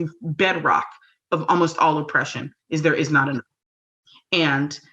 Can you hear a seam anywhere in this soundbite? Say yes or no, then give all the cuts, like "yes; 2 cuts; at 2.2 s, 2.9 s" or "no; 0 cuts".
no; 0 cuts